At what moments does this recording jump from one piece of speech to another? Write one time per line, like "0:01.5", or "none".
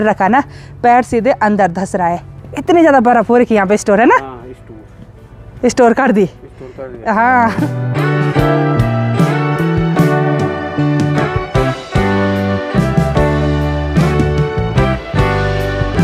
none